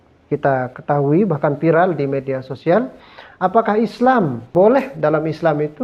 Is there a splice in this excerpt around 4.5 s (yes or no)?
yes